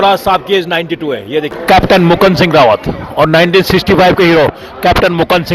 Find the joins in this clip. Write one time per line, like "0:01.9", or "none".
0:01.5